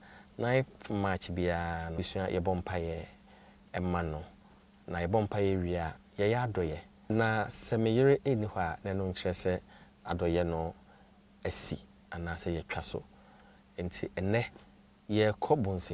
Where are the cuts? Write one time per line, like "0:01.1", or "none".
0:02.0